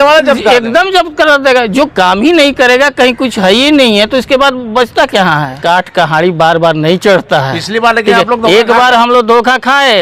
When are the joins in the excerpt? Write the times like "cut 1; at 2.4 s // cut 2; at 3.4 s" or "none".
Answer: cut 1; at 5.6 s